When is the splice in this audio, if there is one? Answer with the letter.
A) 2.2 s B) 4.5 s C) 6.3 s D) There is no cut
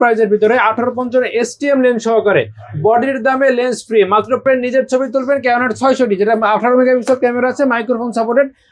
B